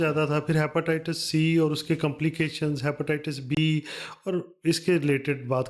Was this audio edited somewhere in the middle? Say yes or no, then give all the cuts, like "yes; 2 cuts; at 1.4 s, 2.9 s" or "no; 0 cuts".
no; 0 cuts